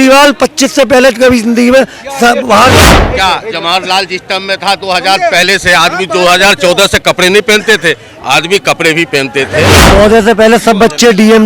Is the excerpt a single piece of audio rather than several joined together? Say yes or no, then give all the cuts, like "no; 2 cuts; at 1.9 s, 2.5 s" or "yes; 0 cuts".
no; 2 cuts; at 2.8 s, 9.8 s